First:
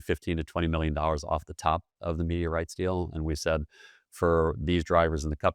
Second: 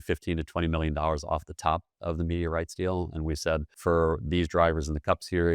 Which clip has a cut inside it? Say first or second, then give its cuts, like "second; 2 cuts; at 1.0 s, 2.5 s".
second; 1 cut; at 3.7 s